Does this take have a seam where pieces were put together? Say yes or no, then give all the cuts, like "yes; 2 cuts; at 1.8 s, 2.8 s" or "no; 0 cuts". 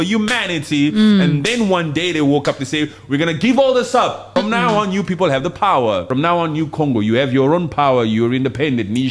yes; 2 cuts; at 4.2 s, 6.1 s